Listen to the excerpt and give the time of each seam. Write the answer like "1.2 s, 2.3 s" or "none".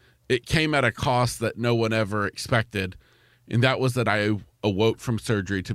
none